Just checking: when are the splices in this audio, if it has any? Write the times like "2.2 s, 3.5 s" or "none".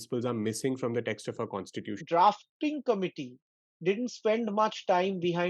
1.9 s